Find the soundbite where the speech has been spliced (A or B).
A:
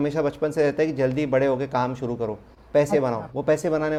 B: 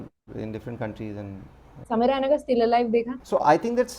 B